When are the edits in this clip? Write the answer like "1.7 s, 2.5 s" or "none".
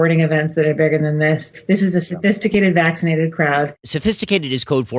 1.6 s, 3.9 s